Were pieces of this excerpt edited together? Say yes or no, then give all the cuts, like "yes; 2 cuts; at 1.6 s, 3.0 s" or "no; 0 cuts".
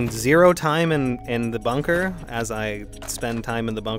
no; 0 cuts